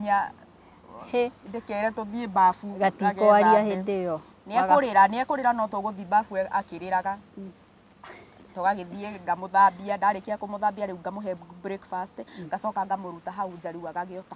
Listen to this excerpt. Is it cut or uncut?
uncut